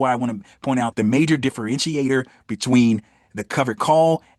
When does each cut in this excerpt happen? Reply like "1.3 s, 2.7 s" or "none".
0.9 s